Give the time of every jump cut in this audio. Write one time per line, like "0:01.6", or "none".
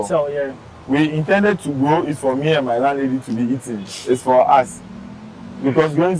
none